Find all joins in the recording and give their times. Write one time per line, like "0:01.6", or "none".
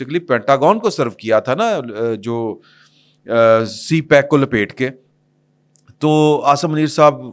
none